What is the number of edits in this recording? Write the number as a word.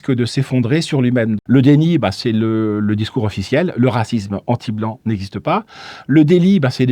one